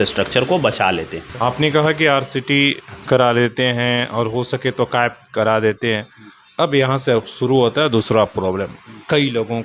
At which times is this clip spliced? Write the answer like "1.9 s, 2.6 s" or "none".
1.2 s